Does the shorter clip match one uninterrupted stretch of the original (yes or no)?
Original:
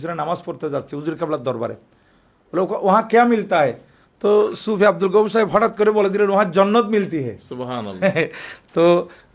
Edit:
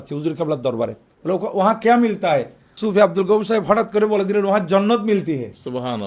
no